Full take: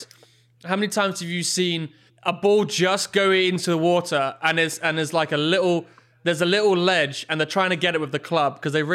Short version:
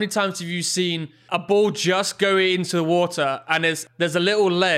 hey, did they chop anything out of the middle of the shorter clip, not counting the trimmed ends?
yes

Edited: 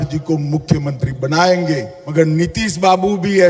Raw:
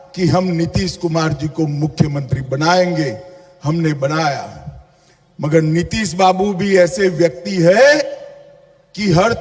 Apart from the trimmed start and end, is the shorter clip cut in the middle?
yes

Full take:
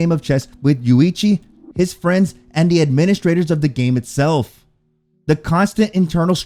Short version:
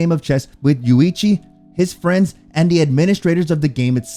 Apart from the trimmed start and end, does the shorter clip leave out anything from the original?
no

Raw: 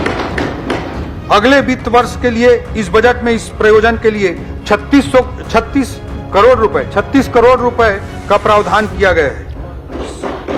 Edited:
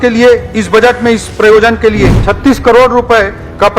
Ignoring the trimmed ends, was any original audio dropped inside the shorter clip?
yes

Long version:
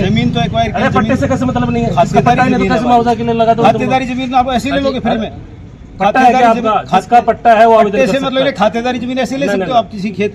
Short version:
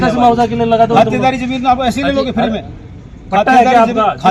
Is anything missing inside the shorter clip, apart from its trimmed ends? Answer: no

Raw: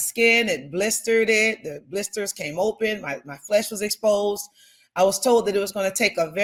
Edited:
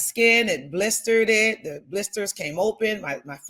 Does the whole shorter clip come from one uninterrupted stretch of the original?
yes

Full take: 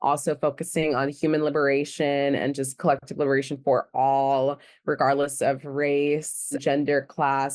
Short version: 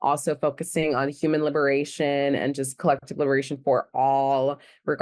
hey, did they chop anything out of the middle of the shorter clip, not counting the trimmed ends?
no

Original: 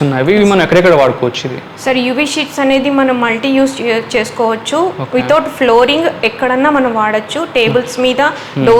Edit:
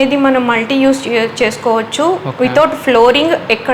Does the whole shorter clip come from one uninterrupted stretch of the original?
yes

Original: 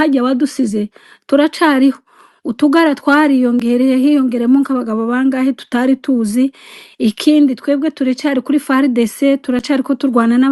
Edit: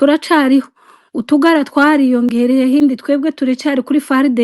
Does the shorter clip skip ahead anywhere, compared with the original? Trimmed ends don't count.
yes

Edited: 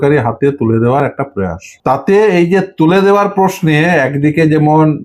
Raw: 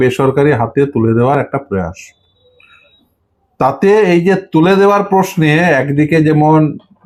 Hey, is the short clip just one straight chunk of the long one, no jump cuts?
no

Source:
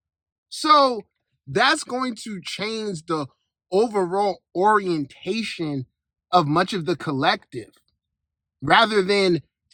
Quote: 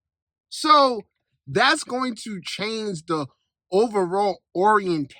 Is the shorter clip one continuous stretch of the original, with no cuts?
yes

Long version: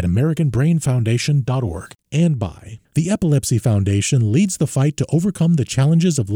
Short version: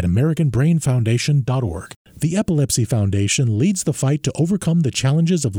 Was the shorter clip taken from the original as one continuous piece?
no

